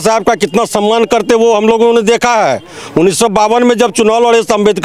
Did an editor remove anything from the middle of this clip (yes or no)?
no